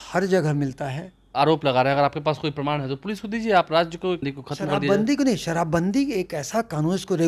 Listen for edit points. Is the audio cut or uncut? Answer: cut